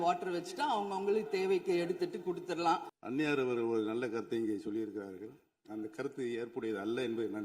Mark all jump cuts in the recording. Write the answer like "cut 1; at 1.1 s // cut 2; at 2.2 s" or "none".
cut 1; at 2.9 s